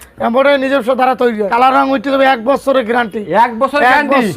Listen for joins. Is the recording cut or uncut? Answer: cut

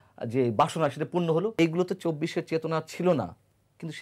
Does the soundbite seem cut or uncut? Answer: cut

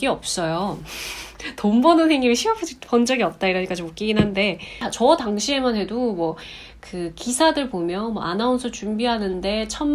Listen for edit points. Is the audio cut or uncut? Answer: cut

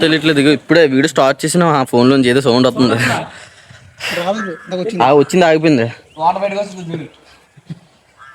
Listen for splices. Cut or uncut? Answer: uncut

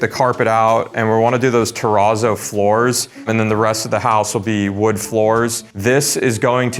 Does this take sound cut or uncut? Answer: uncut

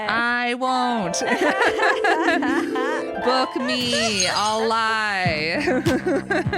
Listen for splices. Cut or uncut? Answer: uncut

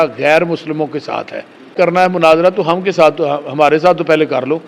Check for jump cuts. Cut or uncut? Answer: cut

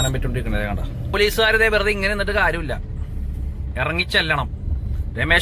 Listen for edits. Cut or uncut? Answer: cut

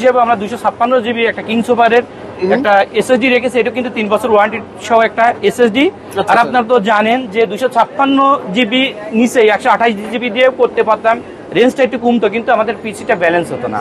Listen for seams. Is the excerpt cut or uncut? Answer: uncut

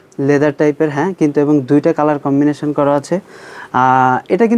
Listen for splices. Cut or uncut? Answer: uncut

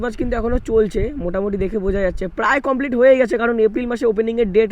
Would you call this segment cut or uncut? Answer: uncut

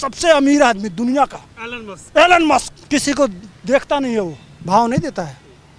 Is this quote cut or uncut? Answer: cut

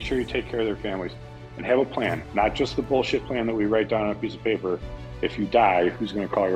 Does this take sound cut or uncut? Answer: uncut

